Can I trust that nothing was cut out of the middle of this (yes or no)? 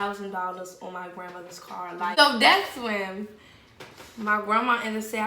no